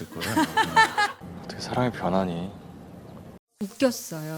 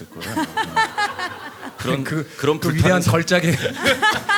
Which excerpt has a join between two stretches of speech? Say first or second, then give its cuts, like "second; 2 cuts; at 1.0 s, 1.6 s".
first; 2 cuts; at 1.2 s, 3.6 s